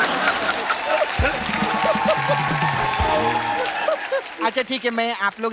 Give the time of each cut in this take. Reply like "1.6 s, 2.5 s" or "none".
4.3 s